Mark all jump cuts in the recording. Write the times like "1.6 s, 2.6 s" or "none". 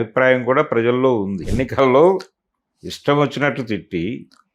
1.4 s